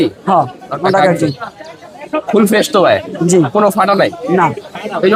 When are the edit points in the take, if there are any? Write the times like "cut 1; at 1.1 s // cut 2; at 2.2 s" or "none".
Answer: none